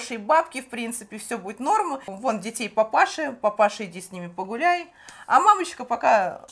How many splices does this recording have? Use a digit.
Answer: 1